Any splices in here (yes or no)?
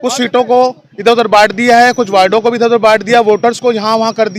no